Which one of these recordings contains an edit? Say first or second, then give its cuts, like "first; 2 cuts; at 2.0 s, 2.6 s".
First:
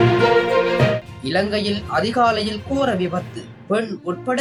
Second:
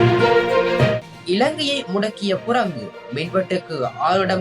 second; 1 cut; at 1.1 s